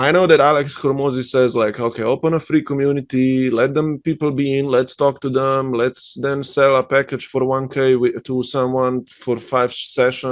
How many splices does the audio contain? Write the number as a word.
zero